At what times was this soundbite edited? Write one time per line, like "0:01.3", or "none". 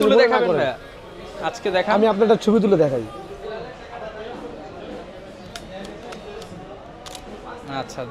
none